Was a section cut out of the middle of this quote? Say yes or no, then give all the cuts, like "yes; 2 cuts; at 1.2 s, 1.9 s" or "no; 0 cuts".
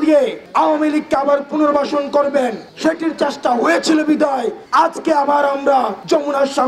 no; 0 cuts